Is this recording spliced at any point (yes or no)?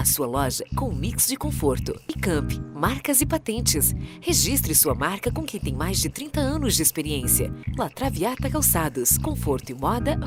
no